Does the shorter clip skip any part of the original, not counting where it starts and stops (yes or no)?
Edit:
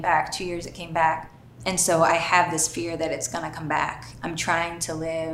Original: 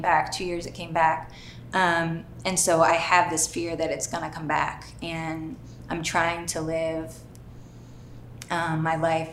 yes